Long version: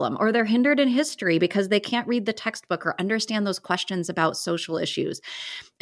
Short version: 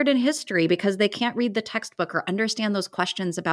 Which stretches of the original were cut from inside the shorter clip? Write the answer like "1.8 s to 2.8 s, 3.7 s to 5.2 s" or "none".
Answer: none